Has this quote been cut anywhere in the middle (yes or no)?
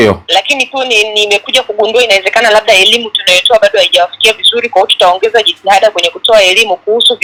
no